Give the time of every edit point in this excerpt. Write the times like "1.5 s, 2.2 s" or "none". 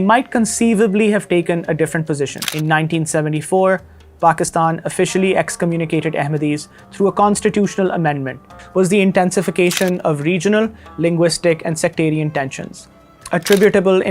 2.4 s, 8.5 s